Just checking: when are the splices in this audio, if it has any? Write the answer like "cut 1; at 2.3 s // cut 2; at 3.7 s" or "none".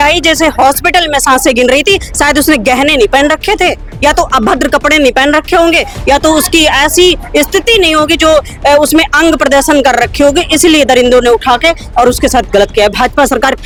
none